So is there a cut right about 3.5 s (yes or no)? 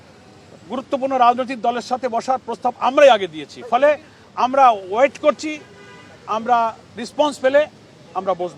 no